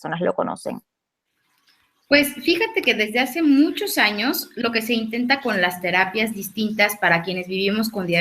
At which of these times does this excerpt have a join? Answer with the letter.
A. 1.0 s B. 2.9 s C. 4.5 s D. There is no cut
A